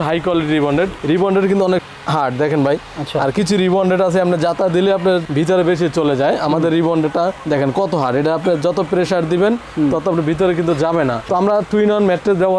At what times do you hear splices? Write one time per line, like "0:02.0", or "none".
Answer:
none